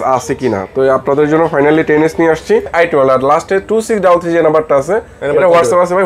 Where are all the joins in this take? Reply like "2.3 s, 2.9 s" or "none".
2.7 s